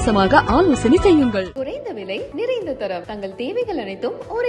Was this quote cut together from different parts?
no; 0 cuts

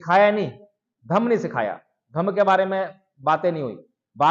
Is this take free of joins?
yes; 0 cuts

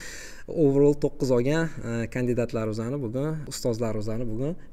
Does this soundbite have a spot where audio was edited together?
yes; 1 cut; at 3.5 s

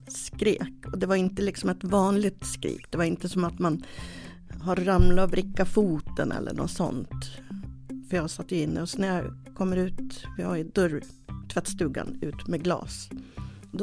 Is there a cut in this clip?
no; 0 cuts

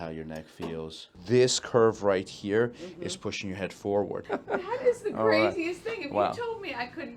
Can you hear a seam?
yes; 2 cuts; at 1.2 s, 4.2 s

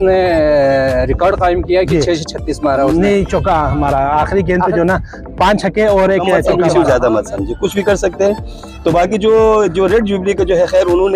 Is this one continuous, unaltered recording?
no; 1 cut; at 6.4 s

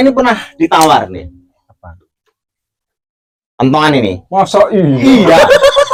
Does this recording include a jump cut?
no; 0 cuts

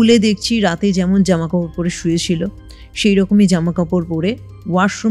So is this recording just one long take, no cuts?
yes; 0 cuts

